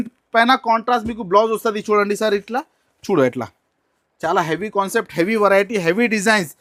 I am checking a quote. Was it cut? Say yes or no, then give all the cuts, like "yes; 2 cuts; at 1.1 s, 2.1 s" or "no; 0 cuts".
no; 0 cuts